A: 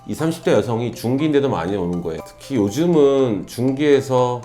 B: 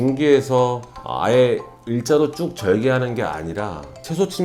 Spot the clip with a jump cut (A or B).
A